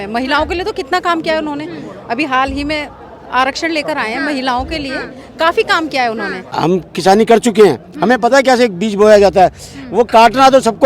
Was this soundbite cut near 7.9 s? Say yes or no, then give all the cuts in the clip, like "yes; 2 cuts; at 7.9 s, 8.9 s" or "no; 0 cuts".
no; 1 cut; at 6.5 s